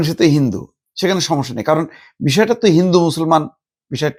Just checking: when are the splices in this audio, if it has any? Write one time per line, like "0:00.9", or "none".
none